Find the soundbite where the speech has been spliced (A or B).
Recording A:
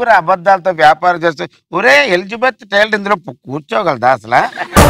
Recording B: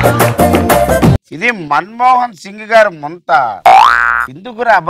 B